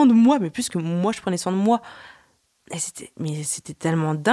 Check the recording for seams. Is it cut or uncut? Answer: uncut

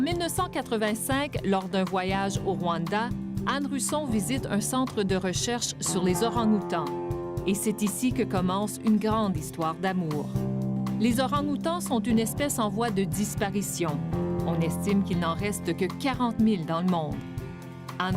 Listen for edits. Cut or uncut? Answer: cut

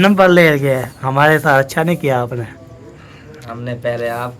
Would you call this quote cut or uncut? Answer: uncut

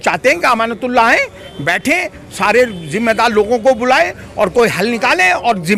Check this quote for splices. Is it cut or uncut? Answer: uncut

